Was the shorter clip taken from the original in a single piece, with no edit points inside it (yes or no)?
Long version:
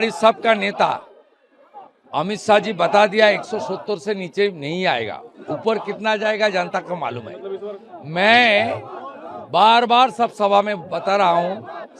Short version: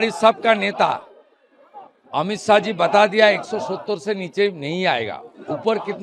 yes